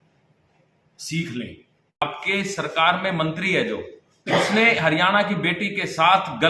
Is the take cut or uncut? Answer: cut